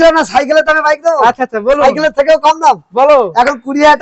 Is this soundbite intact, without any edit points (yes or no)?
yes